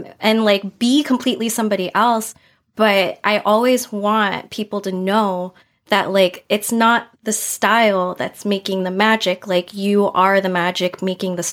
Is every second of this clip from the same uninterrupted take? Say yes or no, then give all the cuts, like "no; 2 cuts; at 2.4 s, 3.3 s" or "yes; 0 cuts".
yes; 0 cuts